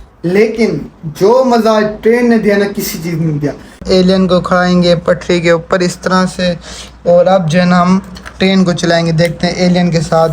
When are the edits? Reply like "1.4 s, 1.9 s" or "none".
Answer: 3.8 s